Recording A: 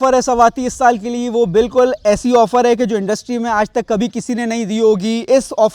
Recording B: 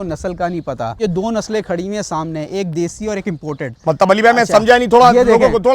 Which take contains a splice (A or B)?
B